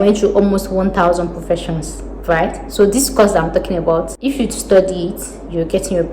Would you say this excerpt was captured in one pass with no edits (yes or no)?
no